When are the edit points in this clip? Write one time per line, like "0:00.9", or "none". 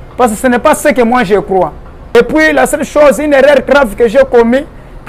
0:02.1

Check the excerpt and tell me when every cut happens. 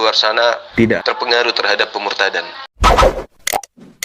0:02.7

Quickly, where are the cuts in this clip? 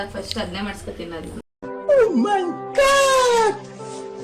0:01.4

